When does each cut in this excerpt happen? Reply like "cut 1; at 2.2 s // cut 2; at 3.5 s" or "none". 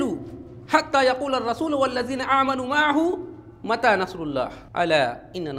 cut 1; at 4.6 s